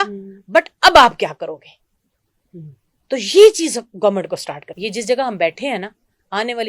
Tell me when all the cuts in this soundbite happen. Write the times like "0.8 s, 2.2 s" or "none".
4.7 s